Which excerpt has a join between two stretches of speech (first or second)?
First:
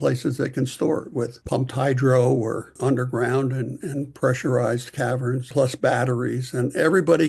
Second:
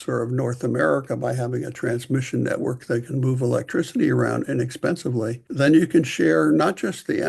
first